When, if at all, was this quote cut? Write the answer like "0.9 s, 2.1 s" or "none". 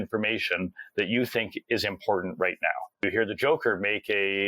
3.0 s